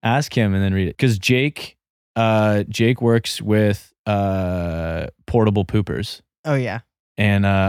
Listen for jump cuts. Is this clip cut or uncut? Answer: cut